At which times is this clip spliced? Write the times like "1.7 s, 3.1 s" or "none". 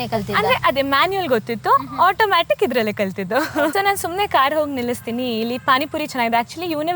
3.7 s